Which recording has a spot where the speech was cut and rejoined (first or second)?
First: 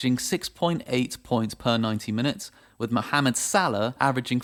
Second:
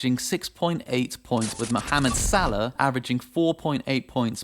second